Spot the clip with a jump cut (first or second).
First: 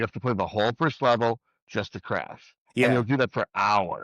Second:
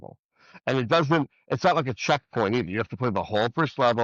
first